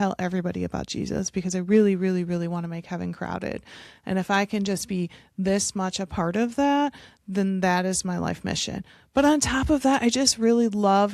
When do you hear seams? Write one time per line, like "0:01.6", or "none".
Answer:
none